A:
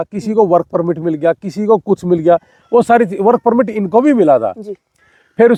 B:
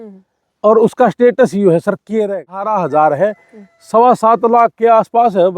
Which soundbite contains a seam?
B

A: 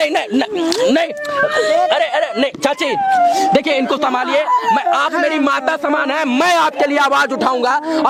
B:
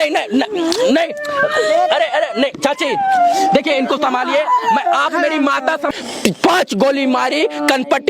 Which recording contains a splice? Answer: B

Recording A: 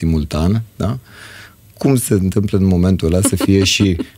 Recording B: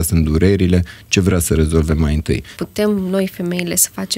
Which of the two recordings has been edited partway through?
B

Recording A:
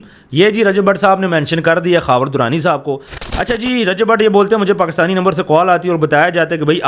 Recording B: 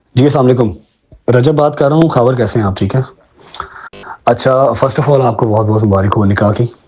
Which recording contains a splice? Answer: A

